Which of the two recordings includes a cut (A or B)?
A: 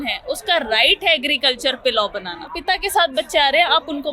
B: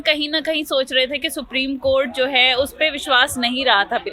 A